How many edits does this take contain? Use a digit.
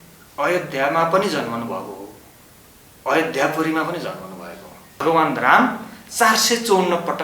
1